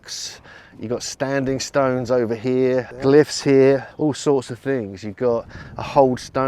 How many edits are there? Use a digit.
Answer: 2